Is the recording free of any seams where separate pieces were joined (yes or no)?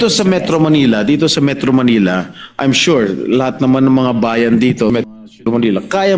no